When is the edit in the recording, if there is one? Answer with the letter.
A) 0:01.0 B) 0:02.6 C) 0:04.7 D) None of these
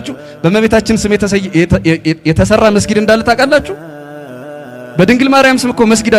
D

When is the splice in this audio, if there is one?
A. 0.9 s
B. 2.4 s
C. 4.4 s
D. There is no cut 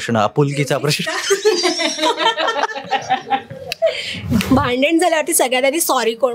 C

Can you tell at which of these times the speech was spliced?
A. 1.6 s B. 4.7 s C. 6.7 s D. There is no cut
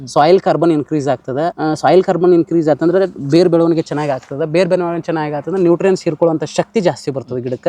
A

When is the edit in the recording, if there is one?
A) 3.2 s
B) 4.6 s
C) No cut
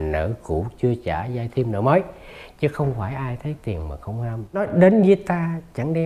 B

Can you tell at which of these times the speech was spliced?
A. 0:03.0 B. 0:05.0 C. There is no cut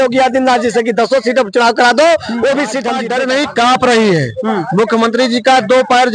A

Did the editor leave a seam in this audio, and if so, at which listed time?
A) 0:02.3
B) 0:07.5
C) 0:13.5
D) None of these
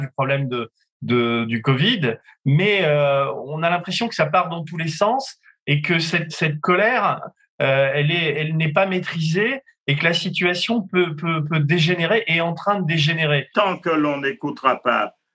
C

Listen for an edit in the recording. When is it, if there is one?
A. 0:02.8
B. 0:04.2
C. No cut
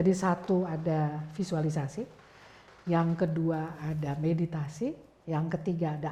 C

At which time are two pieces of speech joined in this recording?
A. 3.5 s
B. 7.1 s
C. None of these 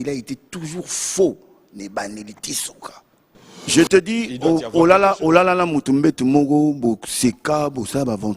A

